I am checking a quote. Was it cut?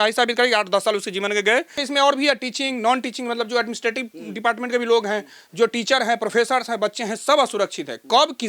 yes; 1 cut; at 1.8 s

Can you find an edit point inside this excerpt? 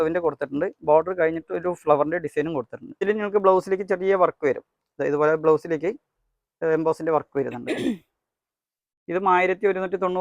yes; 1 cut; at 3.0 s

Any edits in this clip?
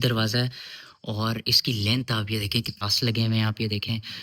yes; 1 cut; at 2.8 s

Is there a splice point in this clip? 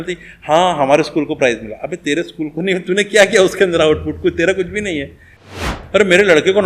yes; 1 cut; at 5.8 s

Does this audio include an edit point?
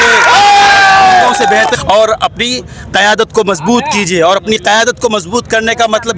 yes; 1 cut; at 1.8 s

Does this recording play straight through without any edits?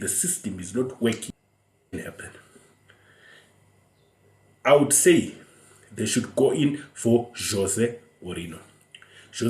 no; 1 cut; at 1.9 s

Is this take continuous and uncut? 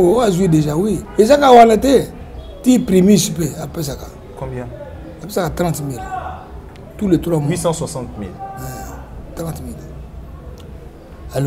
no; 1 cut; at 1.0 s

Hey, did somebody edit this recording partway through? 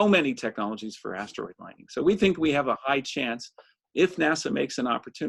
no; 0 cuts

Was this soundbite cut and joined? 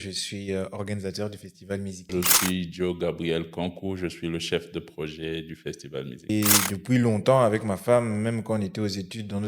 yes; 2 cuts; at 2.1 s, 6.3 s

